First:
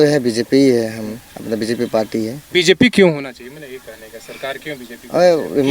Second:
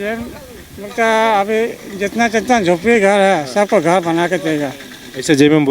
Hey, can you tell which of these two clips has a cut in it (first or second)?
first